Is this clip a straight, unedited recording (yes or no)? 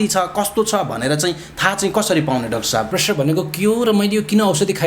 no